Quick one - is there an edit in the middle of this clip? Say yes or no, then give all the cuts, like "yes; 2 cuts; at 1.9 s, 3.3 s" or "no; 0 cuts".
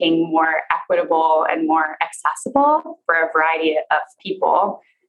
yes; 2 cuts; at 3.0 s, 4.2 s